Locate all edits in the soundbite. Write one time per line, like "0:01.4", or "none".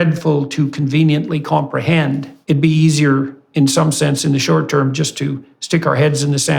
0:02.3